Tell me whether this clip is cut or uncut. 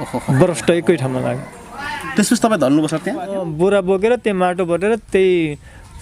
cut